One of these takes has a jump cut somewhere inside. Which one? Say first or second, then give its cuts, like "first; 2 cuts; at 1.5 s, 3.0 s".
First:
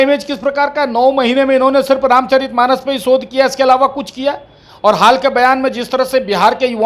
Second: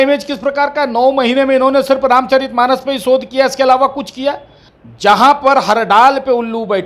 second; 1 cut; at 4.6 s